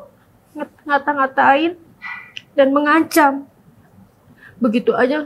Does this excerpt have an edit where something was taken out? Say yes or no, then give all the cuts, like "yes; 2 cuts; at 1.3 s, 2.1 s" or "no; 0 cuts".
no; 0 cuts